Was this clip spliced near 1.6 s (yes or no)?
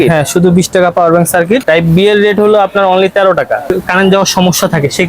yes